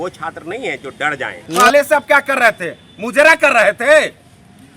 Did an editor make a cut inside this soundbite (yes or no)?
yes